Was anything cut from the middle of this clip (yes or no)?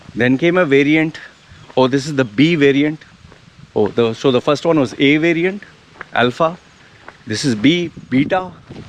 no